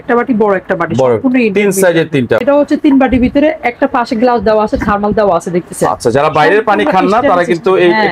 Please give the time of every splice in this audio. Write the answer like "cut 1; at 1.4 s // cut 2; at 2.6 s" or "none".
cut 1; at 2.4 s